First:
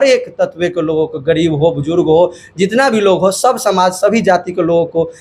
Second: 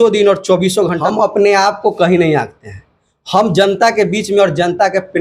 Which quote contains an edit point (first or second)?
second